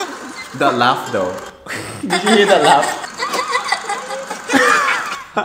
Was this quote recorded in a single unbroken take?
no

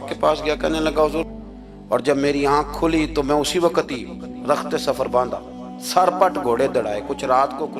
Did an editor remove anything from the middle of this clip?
yes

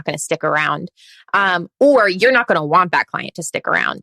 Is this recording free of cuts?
yes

